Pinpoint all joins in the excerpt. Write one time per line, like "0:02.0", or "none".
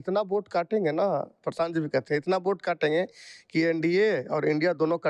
none